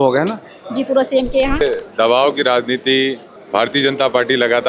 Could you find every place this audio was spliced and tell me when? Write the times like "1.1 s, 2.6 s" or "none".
1.6 s, 3.3 s